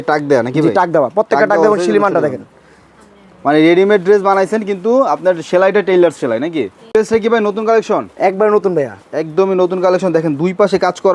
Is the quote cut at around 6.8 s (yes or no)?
yes